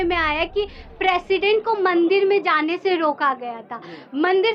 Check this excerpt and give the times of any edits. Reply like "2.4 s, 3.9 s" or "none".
none